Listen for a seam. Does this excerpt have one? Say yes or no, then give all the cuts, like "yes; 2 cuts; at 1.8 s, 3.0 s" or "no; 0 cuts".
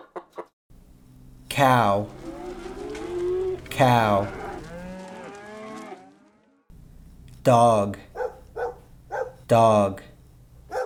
no; 0 cuts